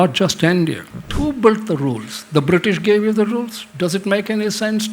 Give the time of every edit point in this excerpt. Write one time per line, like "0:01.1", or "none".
0:01.1